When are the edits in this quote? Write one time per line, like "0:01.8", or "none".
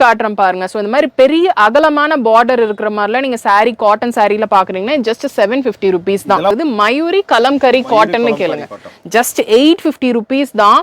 0:06.5